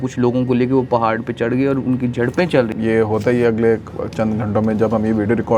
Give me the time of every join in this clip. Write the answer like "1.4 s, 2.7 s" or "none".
2.7 s